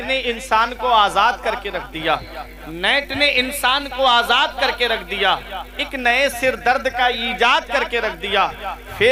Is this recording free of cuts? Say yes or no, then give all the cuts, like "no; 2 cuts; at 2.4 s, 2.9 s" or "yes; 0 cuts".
yes; 0 cuts